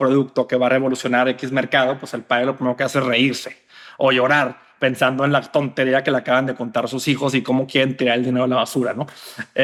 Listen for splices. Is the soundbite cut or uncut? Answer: uncut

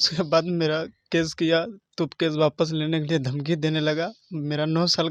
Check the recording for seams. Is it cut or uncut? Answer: uncut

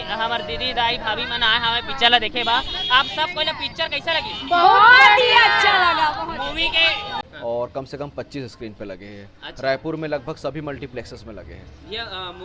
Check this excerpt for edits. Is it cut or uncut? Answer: cut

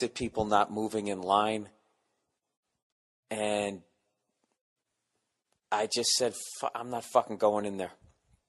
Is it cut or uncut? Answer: uncut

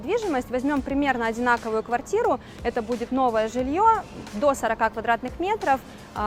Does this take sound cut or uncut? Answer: uncut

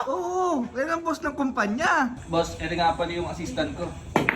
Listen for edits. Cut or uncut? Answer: cut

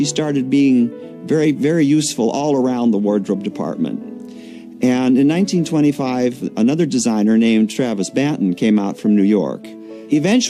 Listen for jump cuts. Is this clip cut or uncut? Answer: uncut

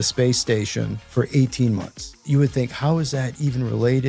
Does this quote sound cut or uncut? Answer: cut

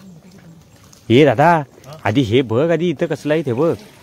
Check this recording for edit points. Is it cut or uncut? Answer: uncut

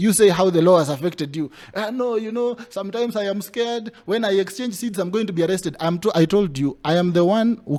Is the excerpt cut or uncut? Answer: uncut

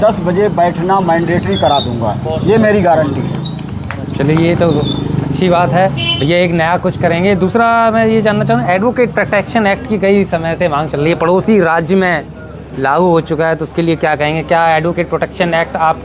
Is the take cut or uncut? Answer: uncut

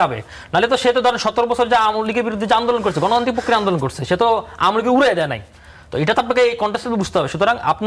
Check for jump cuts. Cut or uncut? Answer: uncut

